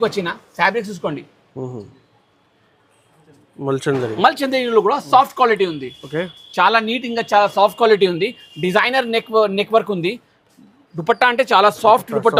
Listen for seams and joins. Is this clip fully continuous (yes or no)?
yes